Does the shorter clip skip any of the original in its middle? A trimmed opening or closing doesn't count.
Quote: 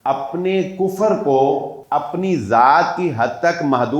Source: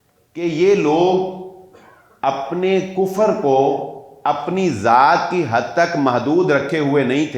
yes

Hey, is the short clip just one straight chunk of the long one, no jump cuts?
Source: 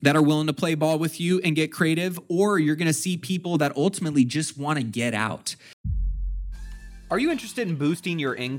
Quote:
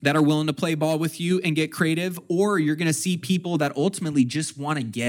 yes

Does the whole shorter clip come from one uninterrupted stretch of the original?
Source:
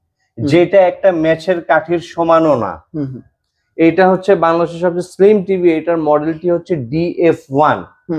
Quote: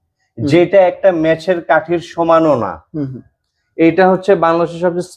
yes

